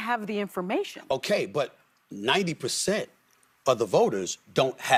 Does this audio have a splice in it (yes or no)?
no